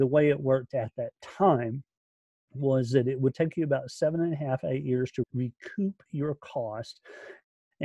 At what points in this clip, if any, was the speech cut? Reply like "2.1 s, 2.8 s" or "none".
5.2 s